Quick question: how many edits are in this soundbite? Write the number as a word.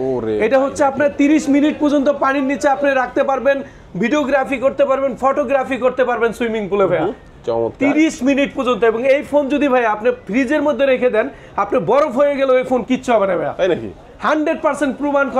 zero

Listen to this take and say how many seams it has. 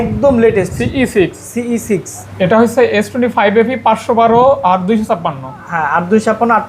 one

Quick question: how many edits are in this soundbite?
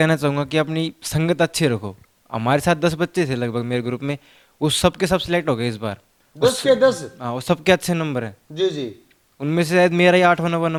zero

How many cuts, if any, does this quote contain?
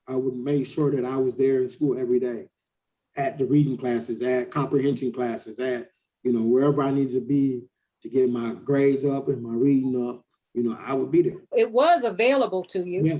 one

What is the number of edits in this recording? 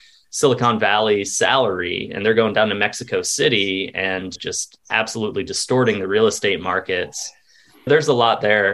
zero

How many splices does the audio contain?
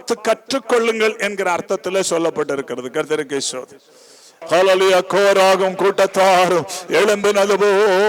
one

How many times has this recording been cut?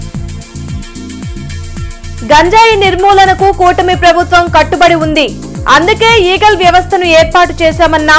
one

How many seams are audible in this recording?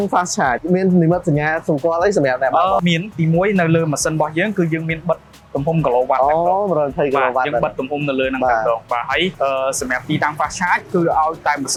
zero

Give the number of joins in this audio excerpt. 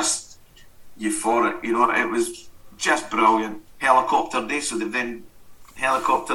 one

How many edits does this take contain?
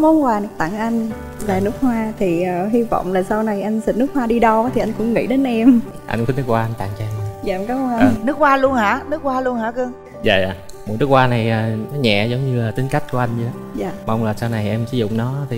zero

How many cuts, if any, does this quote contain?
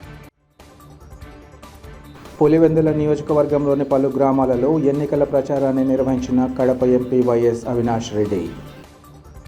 one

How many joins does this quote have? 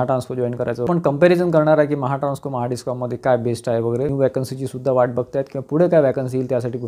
two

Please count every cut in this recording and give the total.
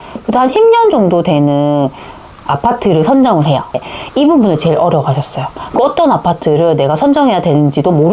one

